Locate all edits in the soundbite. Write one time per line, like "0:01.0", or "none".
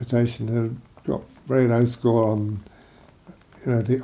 none